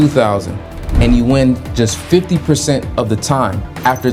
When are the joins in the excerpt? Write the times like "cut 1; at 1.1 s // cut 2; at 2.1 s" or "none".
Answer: none